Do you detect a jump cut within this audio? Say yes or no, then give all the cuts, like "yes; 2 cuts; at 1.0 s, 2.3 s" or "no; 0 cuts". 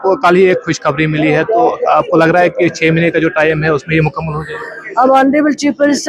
no; 0 cuts